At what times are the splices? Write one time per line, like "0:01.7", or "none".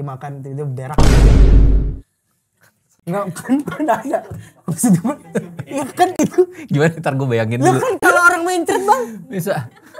none